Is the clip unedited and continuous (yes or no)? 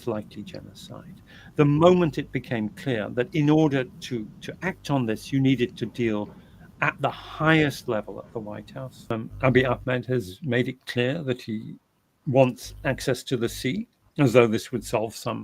no